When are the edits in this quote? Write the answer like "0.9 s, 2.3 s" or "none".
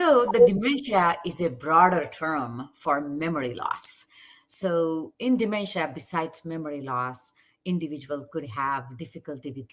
none